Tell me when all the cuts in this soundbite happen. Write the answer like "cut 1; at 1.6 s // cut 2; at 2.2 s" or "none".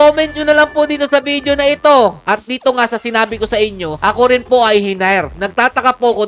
cut 1; at 2.2 s // cut 2; at 5.3 s